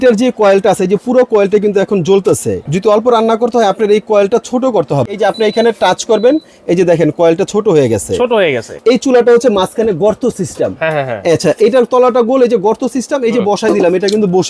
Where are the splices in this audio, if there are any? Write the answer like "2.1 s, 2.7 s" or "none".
2.6 s, 5.2 s, 8.7 s